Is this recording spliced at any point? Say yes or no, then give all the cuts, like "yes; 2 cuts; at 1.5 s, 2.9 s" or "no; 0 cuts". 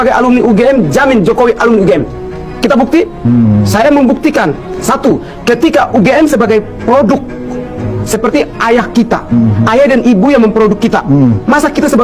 no; 0 cuts